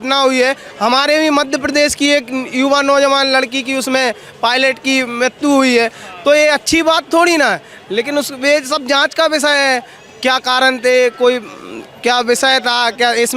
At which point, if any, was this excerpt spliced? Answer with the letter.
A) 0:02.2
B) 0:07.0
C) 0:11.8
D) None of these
D